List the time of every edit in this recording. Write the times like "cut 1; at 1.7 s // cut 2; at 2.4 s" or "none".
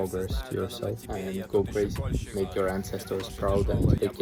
none